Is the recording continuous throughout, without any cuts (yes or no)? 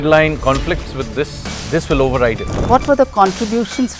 no